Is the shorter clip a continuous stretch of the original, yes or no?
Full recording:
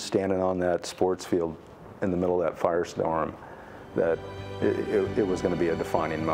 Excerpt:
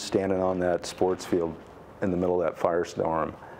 yes